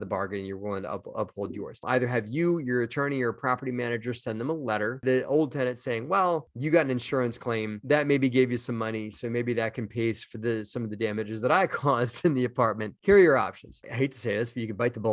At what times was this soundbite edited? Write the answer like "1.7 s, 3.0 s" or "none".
1.8 s, 5.0 s, 6.4 s, 12.9 s

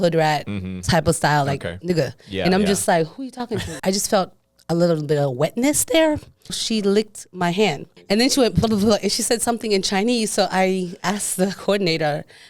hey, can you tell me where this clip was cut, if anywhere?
3.6 s, 6.6 s, 7.9 s

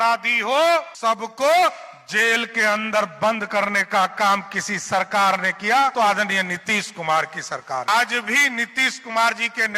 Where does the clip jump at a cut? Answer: 0.9 s, 5.9 s, 7.9 s

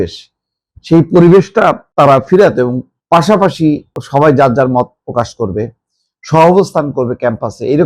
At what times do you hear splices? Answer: 1.8 s, 2.9 s, 3.9 s

